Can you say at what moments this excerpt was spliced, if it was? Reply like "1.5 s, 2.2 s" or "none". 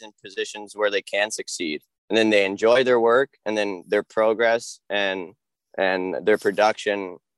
none